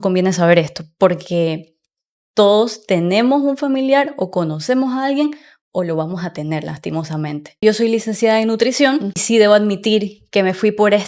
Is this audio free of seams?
no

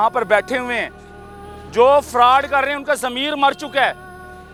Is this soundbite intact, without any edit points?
yes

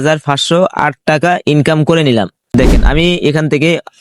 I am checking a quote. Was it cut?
yes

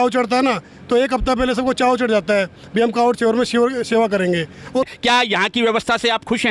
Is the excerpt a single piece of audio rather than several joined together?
no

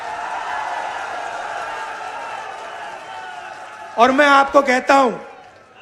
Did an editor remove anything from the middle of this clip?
no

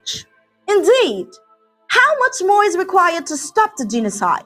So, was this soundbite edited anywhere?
no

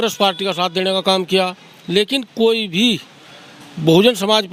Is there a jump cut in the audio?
no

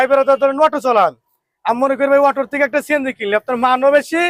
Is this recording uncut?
yes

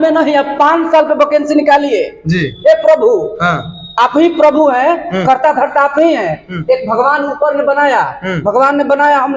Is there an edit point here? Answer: no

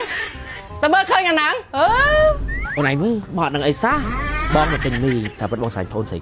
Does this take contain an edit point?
yes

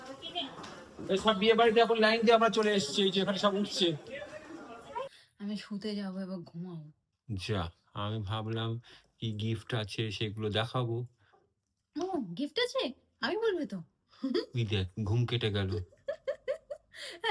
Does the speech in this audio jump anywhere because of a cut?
yes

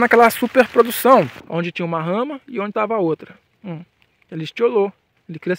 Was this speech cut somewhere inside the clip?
yes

